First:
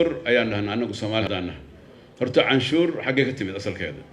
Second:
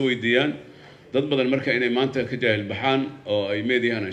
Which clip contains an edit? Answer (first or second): first